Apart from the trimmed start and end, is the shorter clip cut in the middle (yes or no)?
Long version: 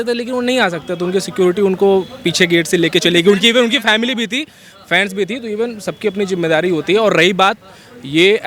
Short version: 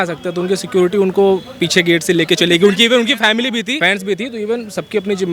yes